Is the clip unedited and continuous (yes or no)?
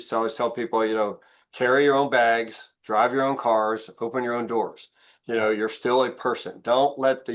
yes